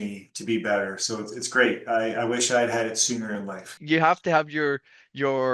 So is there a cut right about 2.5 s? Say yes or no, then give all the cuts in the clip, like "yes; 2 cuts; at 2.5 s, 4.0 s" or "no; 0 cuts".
no; 1 cut; at 3.7 s